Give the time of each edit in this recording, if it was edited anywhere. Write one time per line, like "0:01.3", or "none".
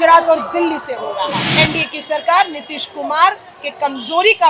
0:01.5